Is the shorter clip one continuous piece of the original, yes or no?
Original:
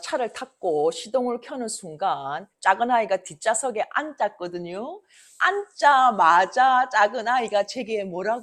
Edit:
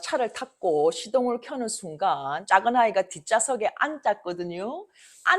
no